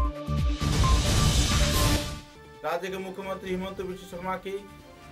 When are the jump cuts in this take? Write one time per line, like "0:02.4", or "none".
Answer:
0:01.9